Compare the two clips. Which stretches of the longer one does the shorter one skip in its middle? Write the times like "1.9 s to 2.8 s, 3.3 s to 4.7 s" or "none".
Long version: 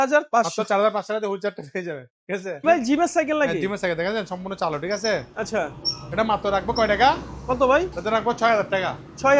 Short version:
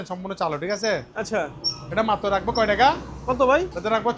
none